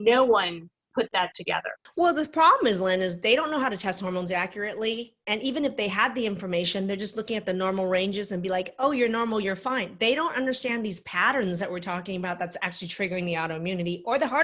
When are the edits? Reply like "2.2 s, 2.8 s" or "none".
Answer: 1.8 s